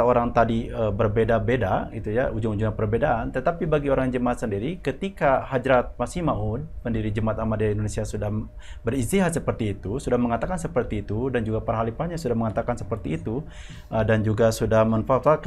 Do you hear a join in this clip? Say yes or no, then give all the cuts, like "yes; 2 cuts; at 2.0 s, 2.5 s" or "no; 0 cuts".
no; 0 cuts